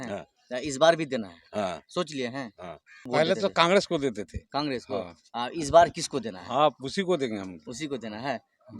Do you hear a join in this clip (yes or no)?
yes